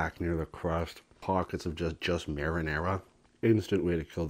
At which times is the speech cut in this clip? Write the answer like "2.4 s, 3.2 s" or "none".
1.1 s, 3.2 s